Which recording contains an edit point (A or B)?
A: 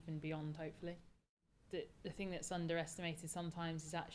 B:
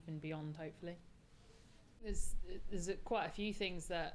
A